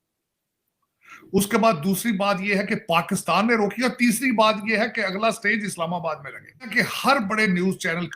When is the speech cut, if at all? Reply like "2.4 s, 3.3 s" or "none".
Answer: 6.7 s